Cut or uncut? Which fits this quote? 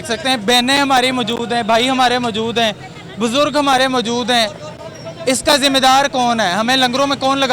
uncut